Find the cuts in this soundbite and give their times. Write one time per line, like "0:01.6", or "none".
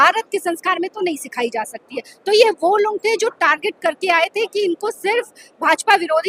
none